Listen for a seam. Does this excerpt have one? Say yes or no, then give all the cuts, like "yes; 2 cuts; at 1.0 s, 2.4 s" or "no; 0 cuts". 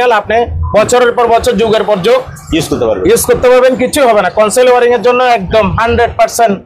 no; 0 cuts